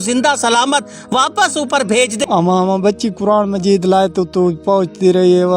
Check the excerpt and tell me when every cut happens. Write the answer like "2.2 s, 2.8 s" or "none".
2.2 s